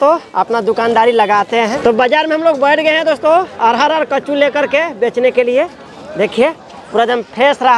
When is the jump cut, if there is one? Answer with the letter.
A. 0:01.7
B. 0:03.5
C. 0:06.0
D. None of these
A